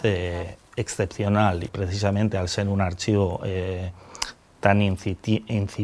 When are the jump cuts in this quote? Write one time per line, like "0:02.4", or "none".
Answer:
0:01.7